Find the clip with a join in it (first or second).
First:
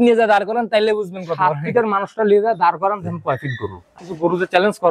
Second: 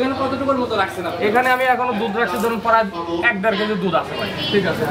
first